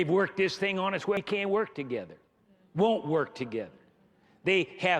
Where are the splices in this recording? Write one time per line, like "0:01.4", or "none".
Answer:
0:01.2